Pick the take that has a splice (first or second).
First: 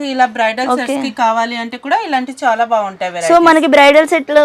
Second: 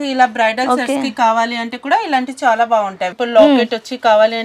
second